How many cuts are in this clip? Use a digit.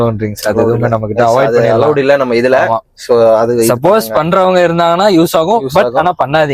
0